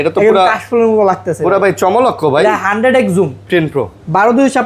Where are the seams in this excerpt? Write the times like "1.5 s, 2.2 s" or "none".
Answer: 3.4 s